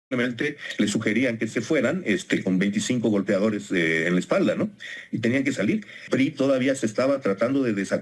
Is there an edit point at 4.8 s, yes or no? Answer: no